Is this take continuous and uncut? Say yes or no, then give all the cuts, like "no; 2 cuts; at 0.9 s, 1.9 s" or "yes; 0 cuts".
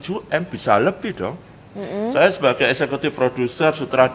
yes; 0 cuts